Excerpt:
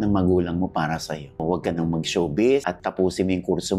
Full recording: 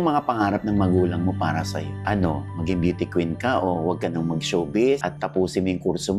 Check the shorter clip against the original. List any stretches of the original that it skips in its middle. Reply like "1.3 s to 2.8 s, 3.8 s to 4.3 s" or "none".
2.0 s to 3.8 s